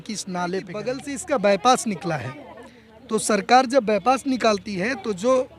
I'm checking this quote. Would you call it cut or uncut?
cut